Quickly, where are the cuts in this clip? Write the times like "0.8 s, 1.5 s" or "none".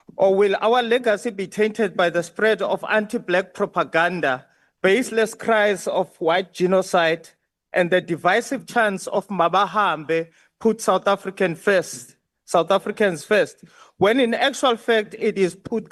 none

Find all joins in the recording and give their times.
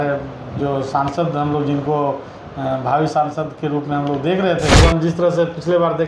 4.8 s

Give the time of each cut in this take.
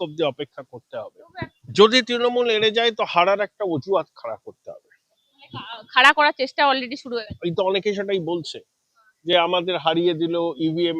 1.6 s

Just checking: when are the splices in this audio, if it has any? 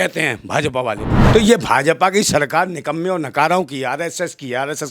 1.1 s

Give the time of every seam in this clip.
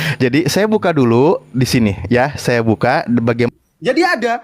3.5 s

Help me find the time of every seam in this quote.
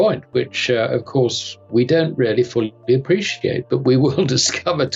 none

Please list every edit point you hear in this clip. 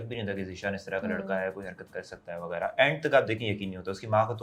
none

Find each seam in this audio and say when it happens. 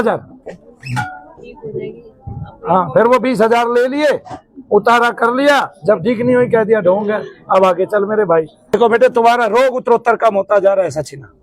8.8 s

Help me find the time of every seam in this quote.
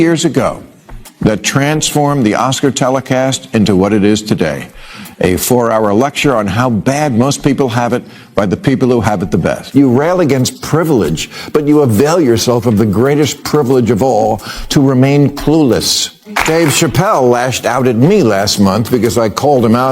9.6 s

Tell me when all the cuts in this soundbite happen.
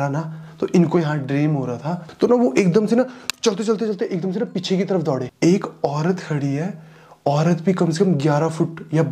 2.0 s, 5.3 s

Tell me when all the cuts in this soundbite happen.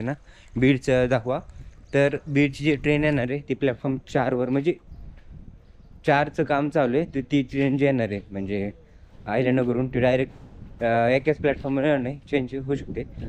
none

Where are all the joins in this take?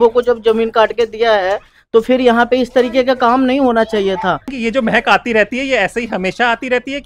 4.5 s

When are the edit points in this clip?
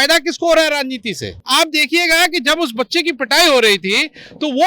1.4 s

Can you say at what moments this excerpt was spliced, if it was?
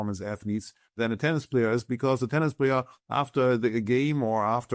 1.0 s

